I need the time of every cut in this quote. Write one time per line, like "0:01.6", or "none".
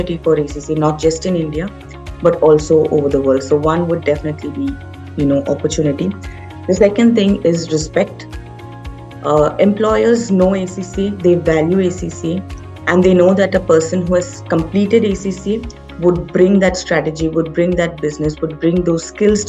none